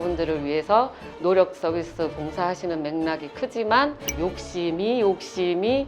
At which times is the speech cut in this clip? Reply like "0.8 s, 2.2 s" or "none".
4.1 s